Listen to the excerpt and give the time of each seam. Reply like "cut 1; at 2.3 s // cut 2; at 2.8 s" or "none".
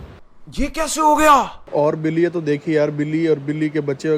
cut 1; at 1.6 s